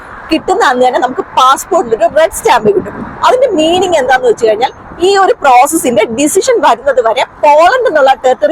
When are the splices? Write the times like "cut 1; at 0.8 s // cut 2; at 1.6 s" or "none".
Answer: none

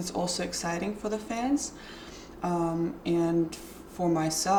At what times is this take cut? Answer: none

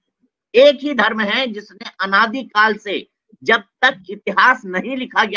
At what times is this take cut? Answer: none

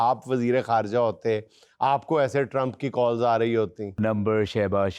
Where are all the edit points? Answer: cut 1; at 4.0 s

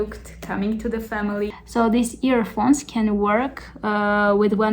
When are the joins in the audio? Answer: cut 1; at 1.6 s

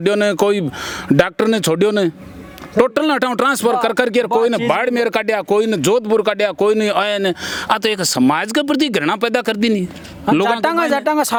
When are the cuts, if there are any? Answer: none

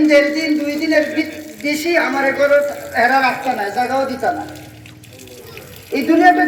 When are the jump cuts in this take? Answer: none

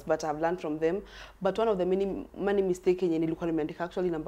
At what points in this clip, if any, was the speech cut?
none

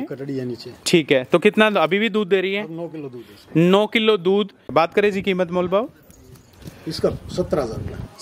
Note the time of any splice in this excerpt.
cut 1; at 4.7 s

